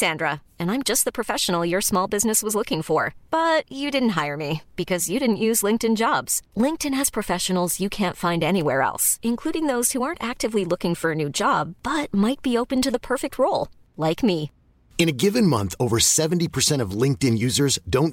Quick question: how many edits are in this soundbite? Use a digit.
0